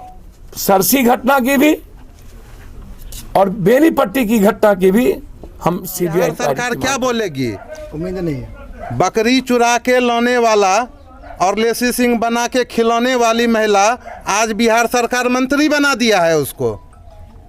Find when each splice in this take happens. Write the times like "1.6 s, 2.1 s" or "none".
6.6 s

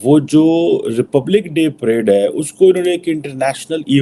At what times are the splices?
none

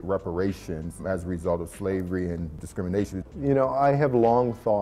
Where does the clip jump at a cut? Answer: 1.0 s

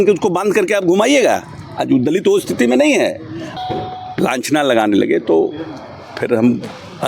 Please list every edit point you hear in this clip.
3.4 s

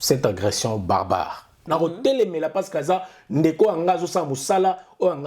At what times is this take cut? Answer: 1.6 s

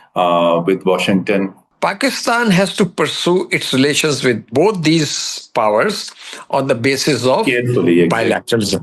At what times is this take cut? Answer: 1.6 s

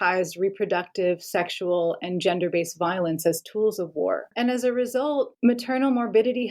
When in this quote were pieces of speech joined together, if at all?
4.3 s

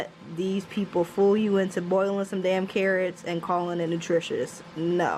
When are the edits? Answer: none

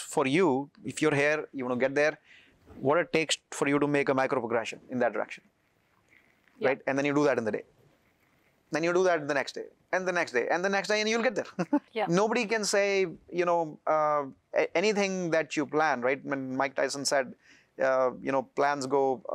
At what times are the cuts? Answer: 11.9 s

